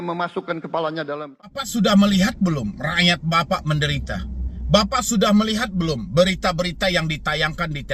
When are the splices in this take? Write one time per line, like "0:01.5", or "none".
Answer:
0:01.3